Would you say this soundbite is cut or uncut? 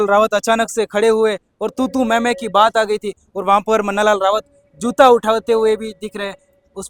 uncut